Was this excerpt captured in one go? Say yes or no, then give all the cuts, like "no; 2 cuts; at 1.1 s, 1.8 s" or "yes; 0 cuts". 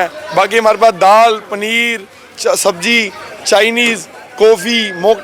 yes; 0 cuts